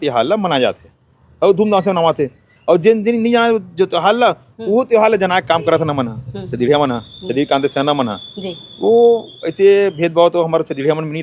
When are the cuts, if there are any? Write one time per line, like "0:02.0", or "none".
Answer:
none